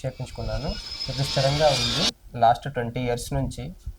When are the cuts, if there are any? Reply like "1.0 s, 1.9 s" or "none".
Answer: 2.2 s